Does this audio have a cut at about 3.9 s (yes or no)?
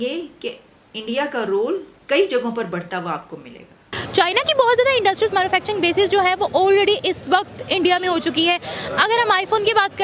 yes